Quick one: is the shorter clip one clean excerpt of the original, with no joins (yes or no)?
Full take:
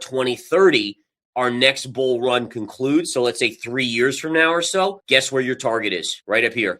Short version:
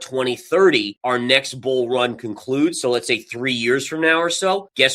no